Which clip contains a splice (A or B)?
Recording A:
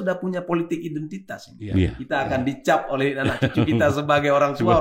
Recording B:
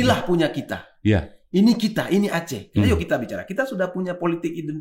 A